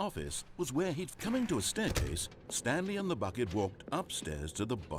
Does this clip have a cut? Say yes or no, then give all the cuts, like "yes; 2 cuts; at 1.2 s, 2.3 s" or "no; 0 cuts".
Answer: yes; 1 cut; at 1.1 s